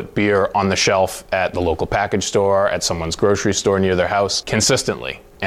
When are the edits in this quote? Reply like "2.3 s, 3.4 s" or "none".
none